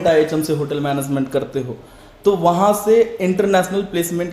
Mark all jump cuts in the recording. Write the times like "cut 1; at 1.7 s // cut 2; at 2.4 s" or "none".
none

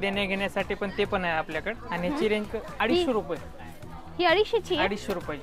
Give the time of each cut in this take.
cut 1; at 1.8 s // cut 2; at 2.6 s

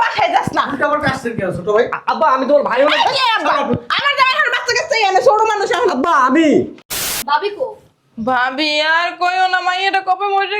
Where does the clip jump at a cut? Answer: cut 1; at 6.9 s

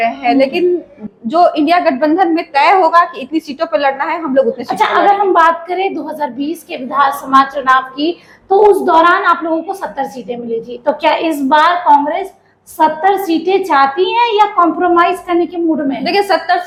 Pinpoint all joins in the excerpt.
none

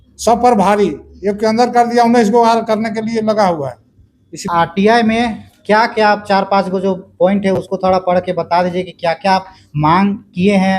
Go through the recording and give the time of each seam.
cut 1; at 4.4 s

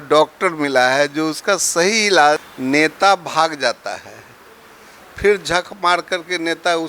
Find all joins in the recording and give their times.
cut 1; at 2.5 s

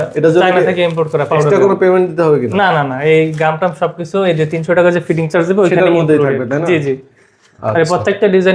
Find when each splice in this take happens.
none

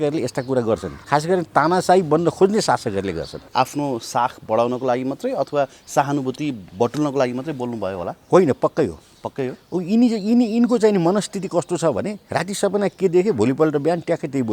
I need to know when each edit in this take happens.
cut 1; at 0.9 s // cut 2; at 3.4 s // cut 3; at 12.2 s

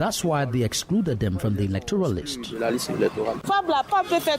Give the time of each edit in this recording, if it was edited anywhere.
cut 1; at 3.4 s

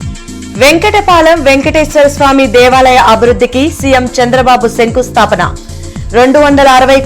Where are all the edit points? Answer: none

